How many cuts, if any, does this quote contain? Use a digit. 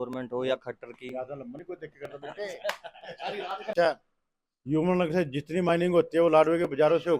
1